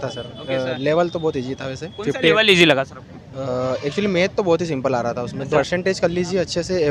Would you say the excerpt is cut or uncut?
cut